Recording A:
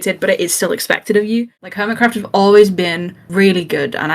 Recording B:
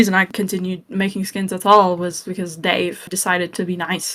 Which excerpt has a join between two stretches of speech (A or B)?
A